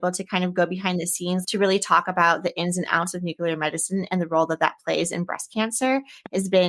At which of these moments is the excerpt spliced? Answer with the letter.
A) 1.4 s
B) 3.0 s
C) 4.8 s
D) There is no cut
A